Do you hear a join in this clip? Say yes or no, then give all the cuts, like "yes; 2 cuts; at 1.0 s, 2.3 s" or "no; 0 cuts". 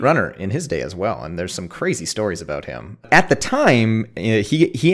yes; 1 cut; at 3.0 s